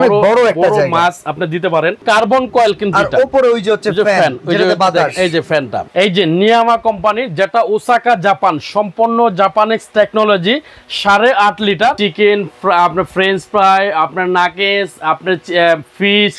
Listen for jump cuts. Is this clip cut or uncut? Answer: cut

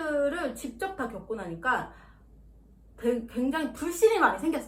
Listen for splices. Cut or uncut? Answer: uncut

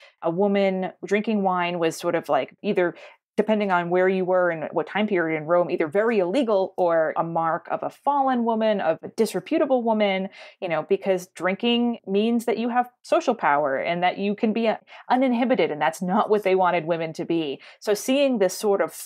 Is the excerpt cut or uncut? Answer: uncut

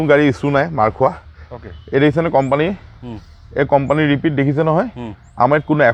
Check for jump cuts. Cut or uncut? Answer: uncut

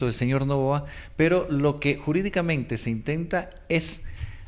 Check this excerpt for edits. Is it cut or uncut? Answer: uncut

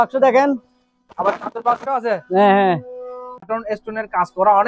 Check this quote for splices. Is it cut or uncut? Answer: cut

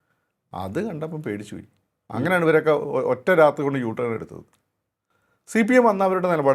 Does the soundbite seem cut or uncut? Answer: uncut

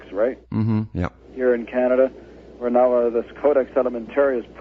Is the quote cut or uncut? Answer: cut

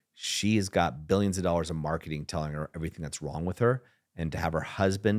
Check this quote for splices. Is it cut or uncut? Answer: uncut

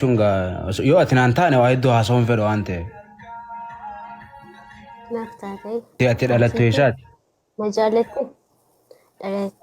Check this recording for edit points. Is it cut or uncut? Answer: cut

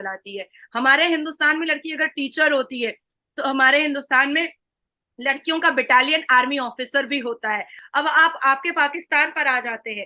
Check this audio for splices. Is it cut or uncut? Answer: cut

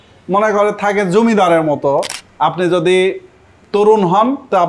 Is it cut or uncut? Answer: cut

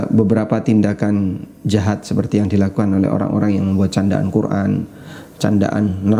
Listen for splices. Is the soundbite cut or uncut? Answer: uncut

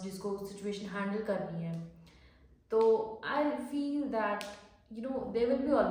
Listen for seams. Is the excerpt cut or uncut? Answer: uncut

